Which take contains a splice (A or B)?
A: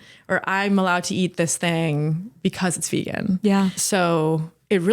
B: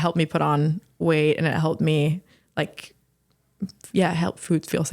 A